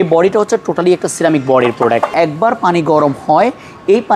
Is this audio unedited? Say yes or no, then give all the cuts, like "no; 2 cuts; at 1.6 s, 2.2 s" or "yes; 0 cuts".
no; 1 cut; at 2.1 s